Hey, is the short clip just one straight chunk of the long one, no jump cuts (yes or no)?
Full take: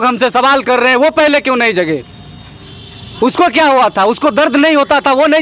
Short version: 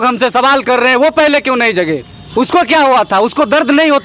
no